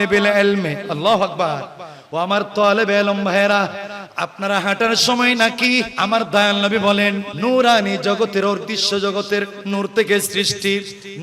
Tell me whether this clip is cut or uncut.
cut